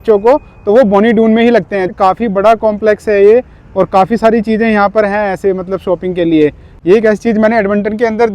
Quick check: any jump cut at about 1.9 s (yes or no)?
yes